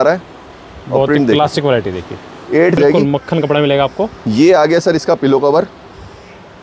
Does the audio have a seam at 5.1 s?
no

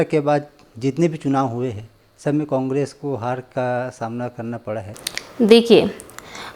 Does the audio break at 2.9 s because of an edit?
no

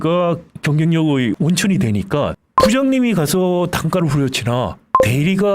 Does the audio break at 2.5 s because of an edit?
yes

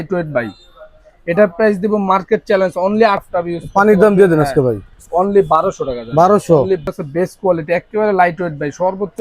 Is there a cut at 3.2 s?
yes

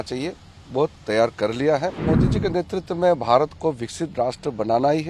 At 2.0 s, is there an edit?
yes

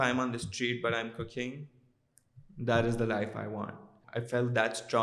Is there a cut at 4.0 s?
yes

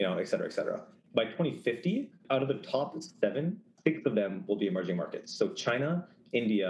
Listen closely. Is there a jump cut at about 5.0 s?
no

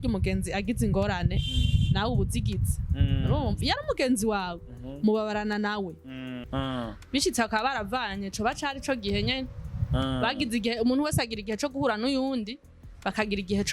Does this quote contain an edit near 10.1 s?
no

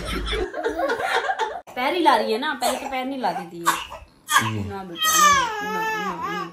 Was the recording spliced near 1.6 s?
yes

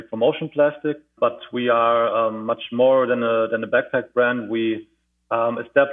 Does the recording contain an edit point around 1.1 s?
yes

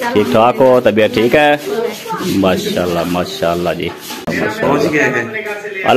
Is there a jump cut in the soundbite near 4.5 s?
yes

